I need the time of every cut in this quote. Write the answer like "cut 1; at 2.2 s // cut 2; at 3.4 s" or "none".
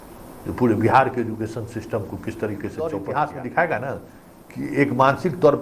cut 1; at 2.8 s